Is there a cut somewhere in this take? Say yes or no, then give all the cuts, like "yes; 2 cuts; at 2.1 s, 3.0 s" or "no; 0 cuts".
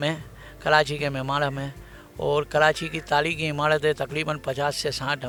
no; 0 cuts